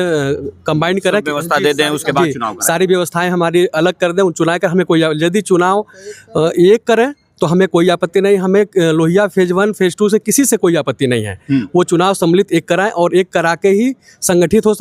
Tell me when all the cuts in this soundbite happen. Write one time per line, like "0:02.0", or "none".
none